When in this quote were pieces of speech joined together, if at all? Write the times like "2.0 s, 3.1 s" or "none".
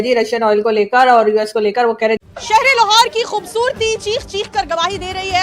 2.2 s

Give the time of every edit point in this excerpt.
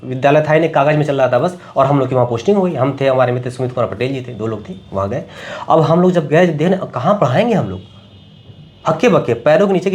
none

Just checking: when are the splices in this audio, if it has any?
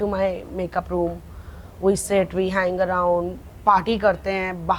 none

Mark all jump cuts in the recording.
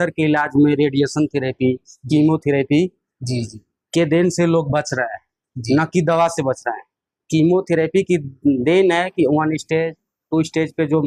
none

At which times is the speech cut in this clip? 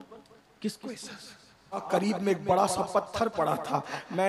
1.8 s

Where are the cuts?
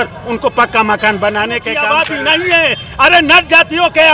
1.7 s

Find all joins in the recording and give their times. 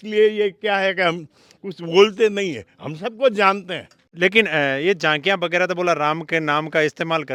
none

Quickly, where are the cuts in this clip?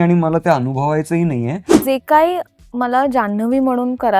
1.7 s

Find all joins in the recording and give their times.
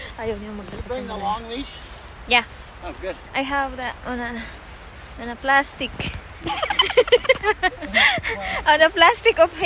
none

